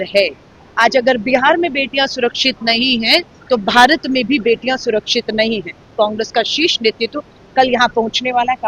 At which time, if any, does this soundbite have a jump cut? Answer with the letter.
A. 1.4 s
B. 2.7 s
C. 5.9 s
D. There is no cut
C